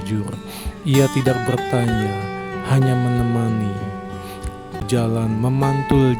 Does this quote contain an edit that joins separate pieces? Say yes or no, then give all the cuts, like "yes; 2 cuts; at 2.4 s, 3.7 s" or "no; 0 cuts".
yes; 1 cut; at 4.8 s